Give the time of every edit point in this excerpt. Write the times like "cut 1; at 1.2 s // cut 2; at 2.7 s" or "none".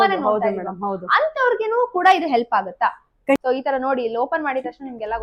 cut 1; at 3.4 s